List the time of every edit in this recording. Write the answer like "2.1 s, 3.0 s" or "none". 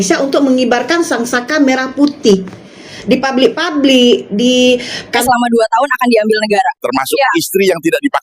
5.2 s